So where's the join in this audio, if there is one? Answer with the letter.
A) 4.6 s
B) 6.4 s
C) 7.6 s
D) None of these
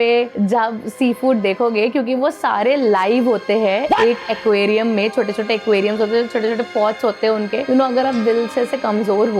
C